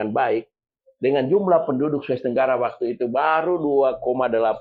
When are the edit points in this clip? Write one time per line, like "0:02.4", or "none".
none